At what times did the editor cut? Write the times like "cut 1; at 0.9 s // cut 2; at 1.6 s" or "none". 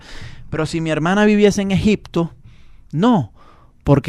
none